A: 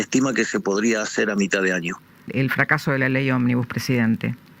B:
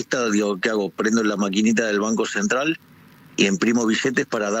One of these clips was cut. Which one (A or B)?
A